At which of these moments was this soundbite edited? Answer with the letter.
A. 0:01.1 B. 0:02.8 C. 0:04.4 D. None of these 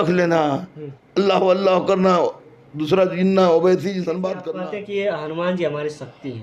C